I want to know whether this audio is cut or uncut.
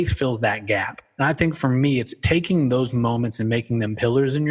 cut